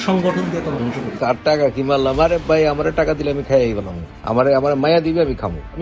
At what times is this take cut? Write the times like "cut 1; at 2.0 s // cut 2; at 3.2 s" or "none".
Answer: cut 1; at 0.9 s